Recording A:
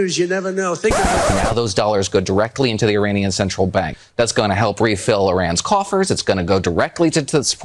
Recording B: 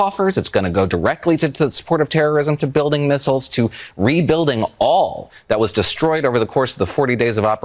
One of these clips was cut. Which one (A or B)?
A